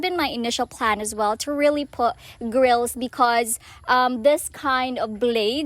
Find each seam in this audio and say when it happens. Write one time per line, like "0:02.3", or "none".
none